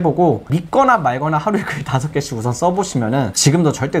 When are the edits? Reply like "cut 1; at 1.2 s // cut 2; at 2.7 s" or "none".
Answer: none